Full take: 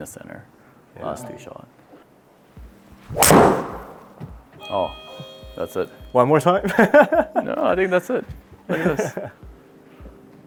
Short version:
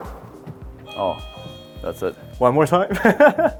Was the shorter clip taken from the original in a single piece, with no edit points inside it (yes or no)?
yes